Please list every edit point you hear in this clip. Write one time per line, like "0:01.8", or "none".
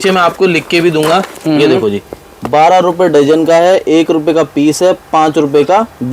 none